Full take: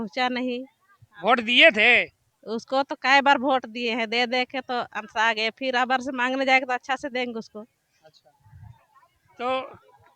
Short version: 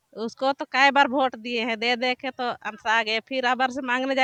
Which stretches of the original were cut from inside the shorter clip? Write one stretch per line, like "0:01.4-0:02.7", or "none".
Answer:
none